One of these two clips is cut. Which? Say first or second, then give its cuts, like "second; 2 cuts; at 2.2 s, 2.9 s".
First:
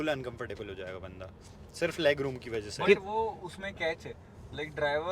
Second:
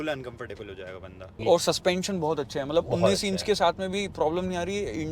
second; 1 cut; at 1.4 s